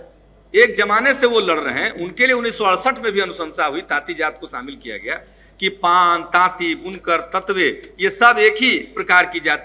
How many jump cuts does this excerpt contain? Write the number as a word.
zero